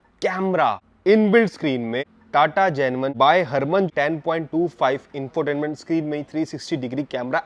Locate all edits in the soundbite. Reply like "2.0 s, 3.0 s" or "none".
0.9 s, 2.1 s, 3.1 s, 3.9 s